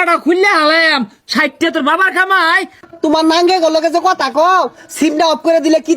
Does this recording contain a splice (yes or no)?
yes